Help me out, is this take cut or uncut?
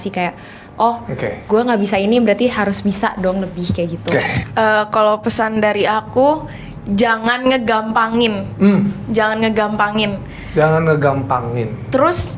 cut